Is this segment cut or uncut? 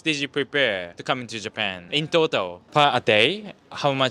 cut